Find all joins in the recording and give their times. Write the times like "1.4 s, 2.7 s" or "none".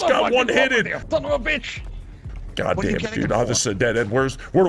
1.0 s